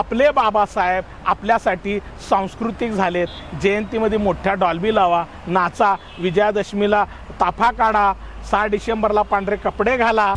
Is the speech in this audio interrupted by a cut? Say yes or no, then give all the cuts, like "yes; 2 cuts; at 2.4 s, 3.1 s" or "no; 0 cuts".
no; 0 cuts